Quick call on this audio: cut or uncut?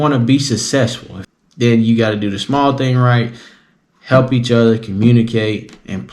cut